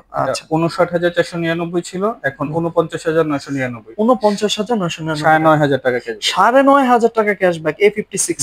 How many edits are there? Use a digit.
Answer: 0